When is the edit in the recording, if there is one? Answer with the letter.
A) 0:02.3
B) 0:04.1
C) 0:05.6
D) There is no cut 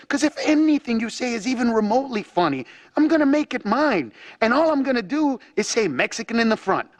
D